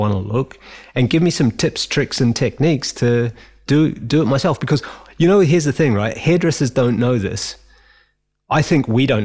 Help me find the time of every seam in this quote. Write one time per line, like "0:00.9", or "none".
none